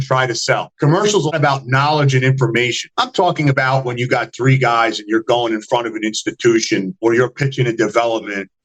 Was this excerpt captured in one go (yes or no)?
no